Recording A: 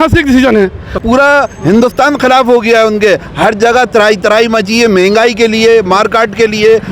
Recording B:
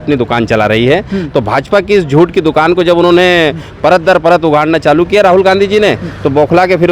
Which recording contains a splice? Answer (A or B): A